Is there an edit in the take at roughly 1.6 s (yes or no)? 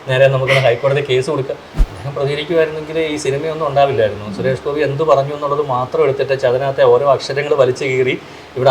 yes